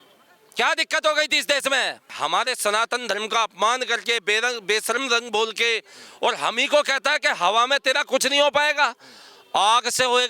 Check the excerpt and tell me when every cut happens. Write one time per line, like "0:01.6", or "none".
0:02.1